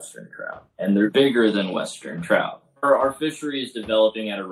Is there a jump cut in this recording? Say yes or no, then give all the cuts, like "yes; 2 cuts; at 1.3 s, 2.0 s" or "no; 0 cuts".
yes; 2 cuts; at 1.1 s, 2.8 s